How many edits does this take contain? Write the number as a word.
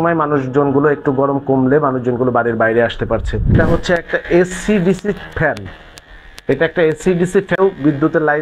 two